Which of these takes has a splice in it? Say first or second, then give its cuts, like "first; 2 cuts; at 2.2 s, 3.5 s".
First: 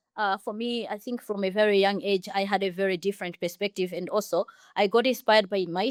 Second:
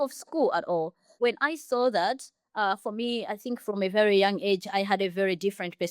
second; 1 cut; at 1.0 s